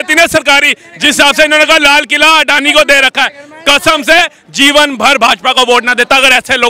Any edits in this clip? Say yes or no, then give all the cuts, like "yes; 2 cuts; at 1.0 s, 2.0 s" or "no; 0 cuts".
no; 0 cuts